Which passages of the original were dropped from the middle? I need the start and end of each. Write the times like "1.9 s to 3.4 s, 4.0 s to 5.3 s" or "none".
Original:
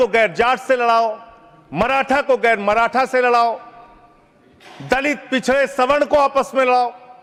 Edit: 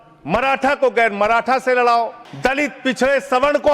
3.7 s to 4.7 s